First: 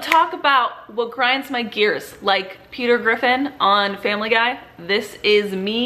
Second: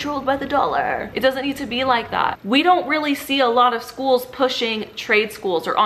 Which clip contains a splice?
second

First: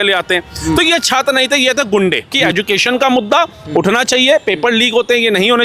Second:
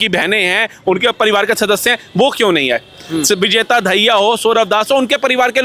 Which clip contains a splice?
first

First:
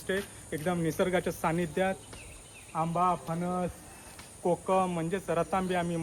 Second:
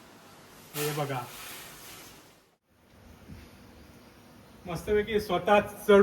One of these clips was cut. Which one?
second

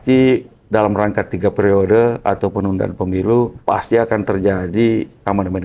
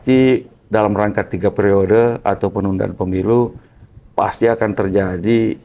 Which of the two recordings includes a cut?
first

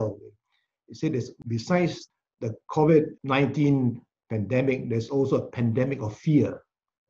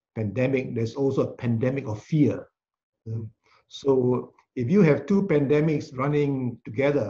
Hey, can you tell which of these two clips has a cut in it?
first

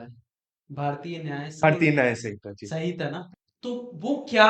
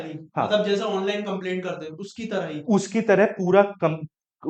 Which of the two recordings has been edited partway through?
first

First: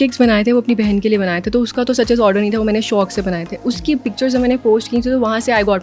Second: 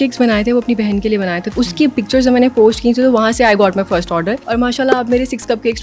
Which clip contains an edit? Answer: second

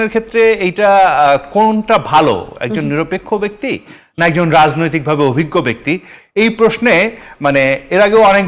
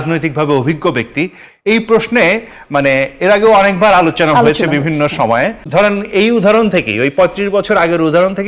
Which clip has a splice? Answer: second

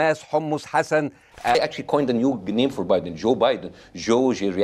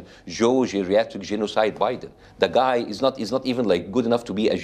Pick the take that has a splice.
first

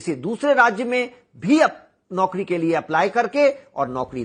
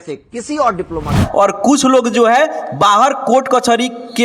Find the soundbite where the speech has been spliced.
second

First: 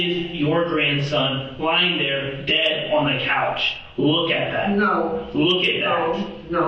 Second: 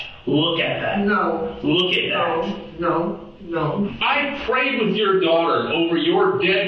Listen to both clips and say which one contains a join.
second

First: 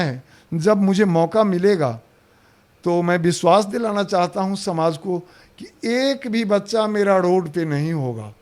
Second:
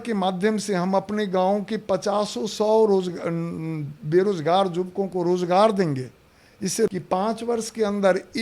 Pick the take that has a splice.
second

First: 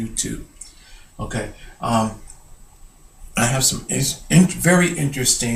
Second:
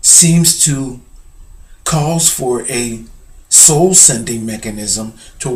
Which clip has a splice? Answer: second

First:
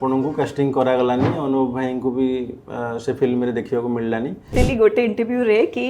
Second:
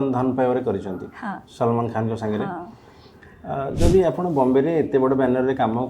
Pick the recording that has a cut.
first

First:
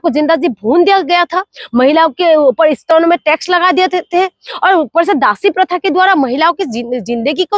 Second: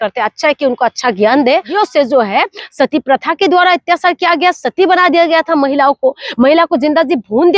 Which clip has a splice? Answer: second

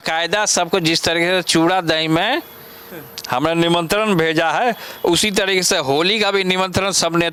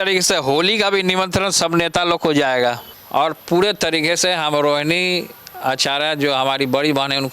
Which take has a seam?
second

